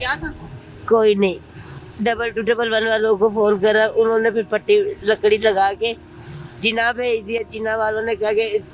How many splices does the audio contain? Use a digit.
0